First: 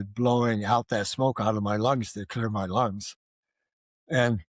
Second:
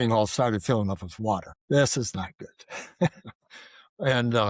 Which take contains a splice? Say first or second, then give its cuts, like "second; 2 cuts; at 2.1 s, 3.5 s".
second; 1 cut; at 1.5 s